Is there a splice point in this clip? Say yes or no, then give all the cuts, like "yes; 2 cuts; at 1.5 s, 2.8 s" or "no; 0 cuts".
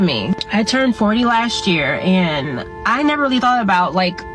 no; 0 cuts